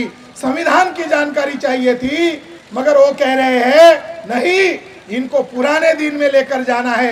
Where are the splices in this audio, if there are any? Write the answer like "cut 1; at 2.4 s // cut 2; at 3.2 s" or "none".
none